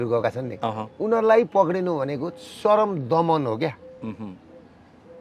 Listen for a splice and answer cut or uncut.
uncut